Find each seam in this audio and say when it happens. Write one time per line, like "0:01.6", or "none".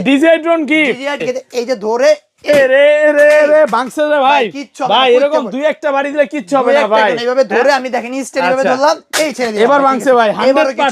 0:01.2

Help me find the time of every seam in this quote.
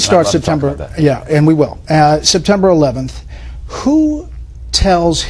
0:04.4

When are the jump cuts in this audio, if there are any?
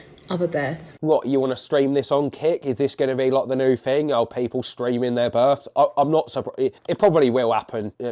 0:01.0

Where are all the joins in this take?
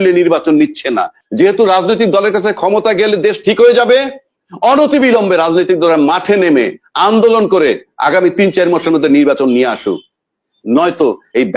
0:01.2

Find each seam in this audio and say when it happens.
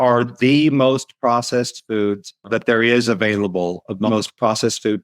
0:02.3
0:04.1

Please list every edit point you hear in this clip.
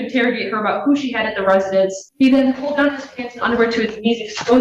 0:02.0

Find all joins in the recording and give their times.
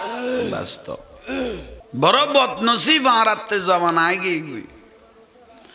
0:01.8

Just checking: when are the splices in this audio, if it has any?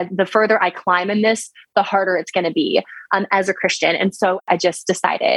0:04.4

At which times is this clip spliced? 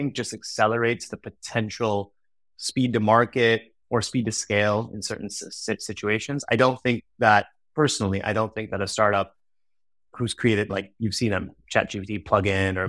none

